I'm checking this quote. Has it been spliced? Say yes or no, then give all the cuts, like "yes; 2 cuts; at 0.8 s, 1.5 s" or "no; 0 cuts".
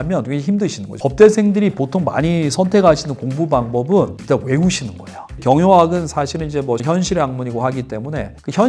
yes; 3 cuts; at 1.0 s, 5.3 s, 6.8 s